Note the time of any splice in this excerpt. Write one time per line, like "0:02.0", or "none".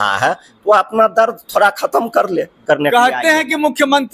0:02.6